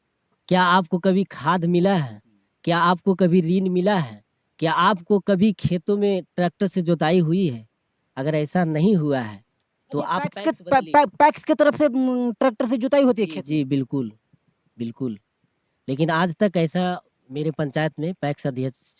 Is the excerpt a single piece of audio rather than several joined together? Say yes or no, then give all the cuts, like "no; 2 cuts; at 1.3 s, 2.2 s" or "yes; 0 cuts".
yes; 0 cuts